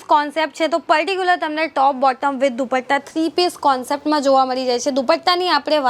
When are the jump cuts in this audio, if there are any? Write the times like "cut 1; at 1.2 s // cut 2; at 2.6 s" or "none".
none